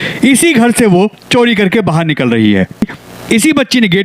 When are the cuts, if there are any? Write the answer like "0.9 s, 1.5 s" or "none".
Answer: 2.9 s

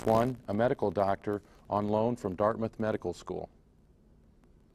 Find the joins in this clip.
2.3 s

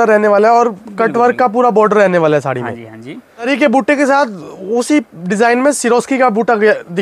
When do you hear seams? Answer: 3.5 s

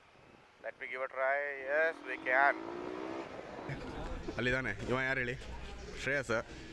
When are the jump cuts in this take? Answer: 3.7 s

